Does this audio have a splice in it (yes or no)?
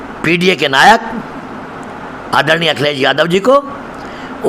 no